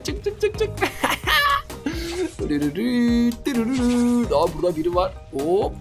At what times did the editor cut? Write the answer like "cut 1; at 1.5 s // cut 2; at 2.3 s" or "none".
none